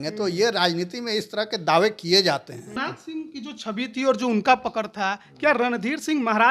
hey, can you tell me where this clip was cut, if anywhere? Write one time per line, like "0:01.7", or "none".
0:02.8